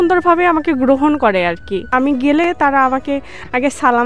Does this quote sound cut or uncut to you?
cut